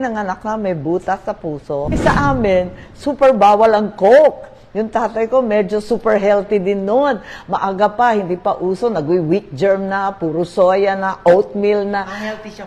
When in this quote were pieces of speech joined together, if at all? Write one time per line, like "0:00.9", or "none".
0:02.0